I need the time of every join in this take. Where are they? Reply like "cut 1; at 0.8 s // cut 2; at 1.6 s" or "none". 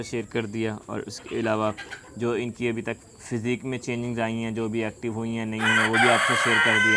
none